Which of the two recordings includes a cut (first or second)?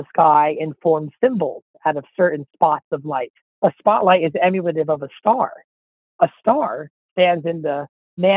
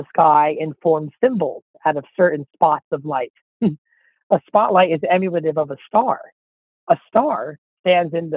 first